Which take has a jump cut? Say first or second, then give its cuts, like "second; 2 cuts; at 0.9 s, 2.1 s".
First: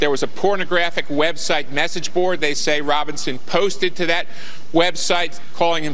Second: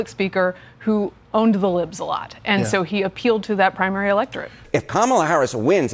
second; 1 cut; at 4.6 s